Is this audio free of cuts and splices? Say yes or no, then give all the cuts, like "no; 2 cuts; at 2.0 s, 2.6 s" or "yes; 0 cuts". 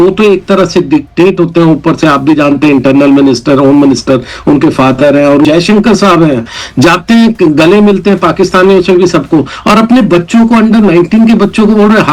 no; 1 cut; at 5.4 s